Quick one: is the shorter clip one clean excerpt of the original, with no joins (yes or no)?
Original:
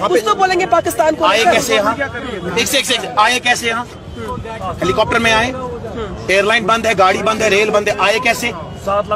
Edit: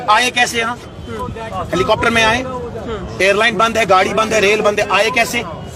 yes